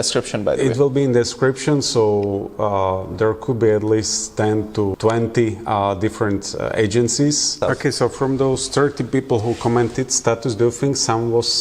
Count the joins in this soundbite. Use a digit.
2